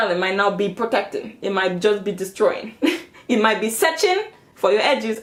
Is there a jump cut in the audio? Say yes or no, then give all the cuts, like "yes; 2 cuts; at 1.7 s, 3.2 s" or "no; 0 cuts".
no; 0 cuts